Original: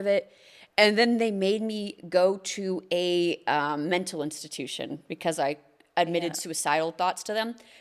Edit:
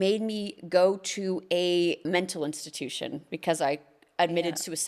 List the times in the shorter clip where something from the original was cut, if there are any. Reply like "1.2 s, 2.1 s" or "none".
2.0 s